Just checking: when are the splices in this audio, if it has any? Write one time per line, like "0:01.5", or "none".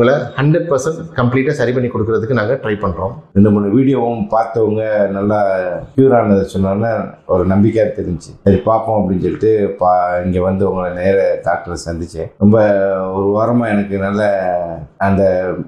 0:03.3